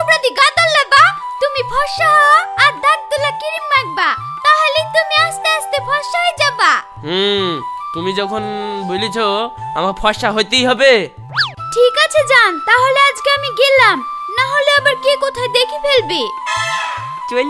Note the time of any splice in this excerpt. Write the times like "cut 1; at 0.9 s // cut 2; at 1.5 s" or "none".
none